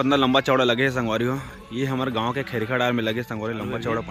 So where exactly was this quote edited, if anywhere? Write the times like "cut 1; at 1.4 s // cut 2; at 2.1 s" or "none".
none